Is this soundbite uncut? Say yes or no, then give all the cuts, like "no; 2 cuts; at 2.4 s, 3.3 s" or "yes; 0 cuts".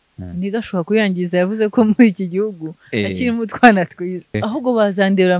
no; 1 cut; at 4.3 s